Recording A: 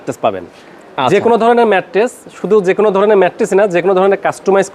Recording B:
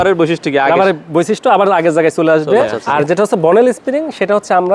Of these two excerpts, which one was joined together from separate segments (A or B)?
B